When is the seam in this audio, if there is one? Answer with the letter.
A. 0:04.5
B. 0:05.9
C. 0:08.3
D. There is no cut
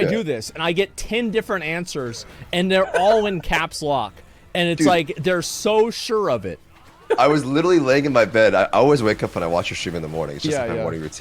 D